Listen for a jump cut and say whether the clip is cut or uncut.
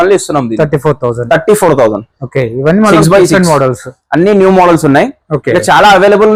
uncut